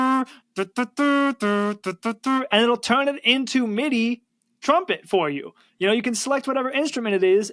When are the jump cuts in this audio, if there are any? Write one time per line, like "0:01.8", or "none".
none